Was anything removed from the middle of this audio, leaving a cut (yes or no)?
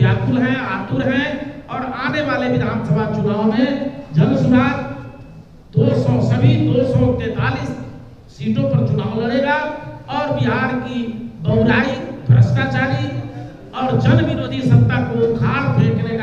no